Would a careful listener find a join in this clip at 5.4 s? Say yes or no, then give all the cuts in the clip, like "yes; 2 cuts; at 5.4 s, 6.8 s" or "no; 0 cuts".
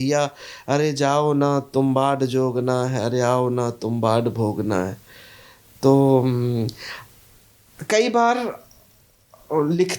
no; 0 cuts